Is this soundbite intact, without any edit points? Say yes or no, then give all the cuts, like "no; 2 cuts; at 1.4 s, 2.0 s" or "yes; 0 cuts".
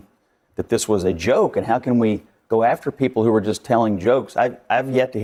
yes; 0 cuts